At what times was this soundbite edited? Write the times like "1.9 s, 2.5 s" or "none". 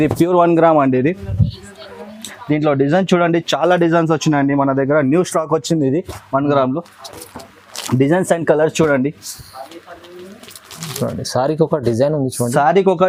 none

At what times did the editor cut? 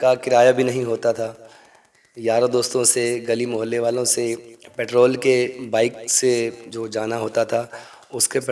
none

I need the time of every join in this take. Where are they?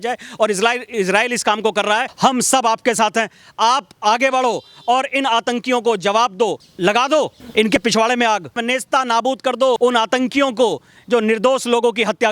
2.1 s, 6.6 s, 7.7 s, 8.6 s, 9.8 s

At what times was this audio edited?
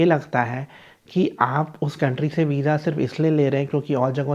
none

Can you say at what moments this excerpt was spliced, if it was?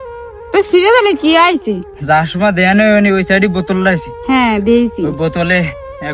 1.9 s

